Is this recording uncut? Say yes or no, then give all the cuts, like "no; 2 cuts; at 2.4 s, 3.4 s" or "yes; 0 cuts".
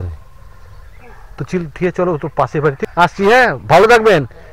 no; 1 cut; at 2.8 s